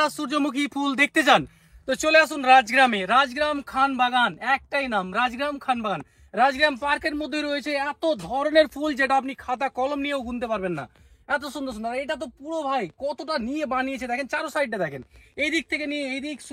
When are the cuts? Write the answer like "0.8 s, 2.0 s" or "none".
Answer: none